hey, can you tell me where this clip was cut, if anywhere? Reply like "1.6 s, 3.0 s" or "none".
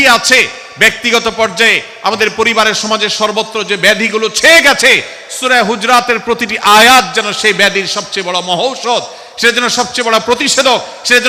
none